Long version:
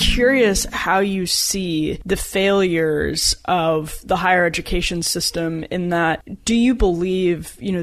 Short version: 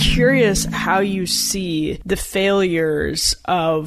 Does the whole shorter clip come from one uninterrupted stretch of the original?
yes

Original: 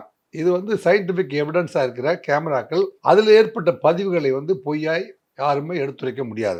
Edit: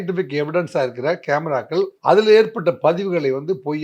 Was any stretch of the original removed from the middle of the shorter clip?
no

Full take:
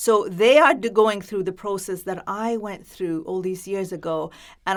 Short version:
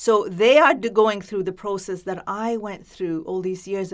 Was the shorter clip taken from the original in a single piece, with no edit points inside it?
yes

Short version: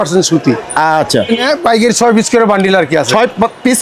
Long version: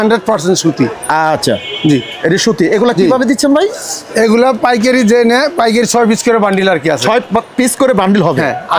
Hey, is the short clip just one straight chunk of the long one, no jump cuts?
no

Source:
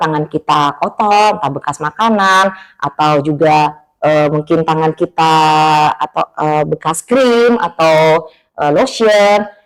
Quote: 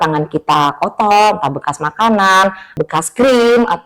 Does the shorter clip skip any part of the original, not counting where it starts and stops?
yes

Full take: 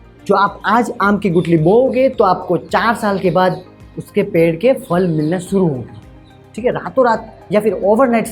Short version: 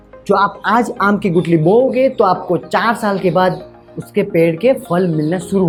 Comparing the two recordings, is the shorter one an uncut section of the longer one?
yes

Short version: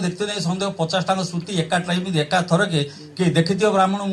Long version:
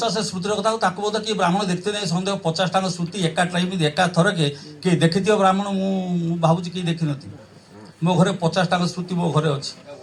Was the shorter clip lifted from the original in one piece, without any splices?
yes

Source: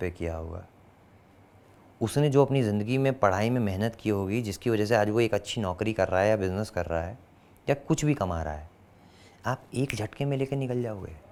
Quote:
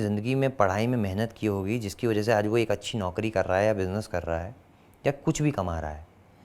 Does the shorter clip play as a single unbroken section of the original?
yes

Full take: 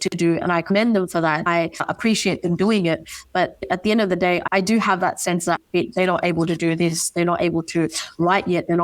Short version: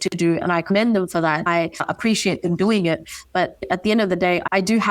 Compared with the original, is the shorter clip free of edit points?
yes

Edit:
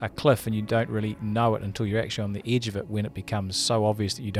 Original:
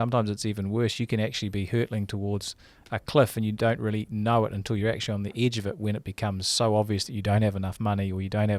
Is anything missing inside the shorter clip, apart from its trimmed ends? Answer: no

